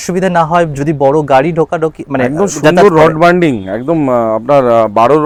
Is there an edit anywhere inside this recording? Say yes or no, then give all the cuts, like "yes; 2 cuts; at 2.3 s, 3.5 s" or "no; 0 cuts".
no; 0 cuts